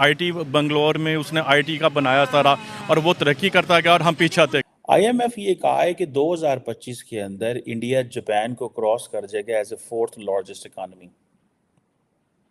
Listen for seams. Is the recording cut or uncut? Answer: cut